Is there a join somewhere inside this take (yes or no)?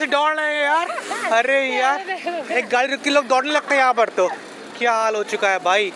no